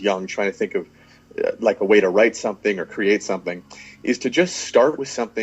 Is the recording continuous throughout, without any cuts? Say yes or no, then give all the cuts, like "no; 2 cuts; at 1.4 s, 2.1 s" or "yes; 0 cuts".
yes; 0 cuts